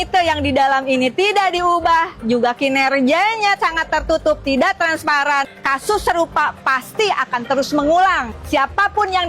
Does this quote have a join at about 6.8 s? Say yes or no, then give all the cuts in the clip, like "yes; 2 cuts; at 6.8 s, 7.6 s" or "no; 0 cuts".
no; 2 cuts; at 5.6 s, 8.3 s